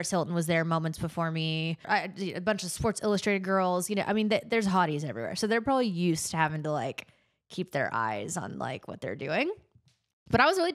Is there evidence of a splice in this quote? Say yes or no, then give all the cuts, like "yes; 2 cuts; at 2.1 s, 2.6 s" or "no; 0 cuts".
yes; 1 cut; at 1.8 s